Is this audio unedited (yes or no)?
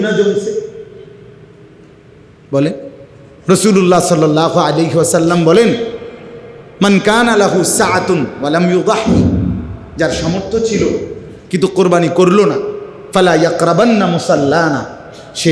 yes